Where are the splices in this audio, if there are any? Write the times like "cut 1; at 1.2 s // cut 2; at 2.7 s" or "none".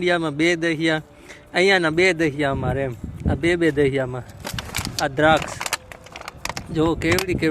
none